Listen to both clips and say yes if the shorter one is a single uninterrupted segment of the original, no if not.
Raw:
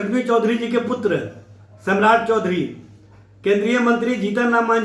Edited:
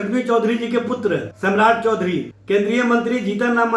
no